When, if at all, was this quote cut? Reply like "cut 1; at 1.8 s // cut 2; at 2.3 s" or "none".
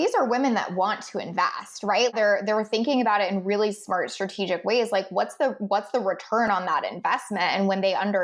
cut 1; at 2.1 s